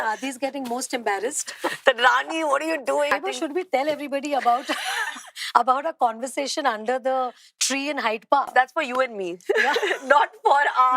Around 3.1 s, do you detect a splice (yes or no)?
yes